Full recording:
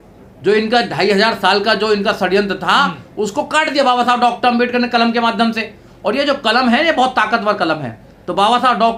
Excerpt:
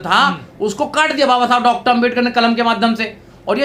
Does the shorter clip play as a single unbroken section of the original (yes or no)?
yes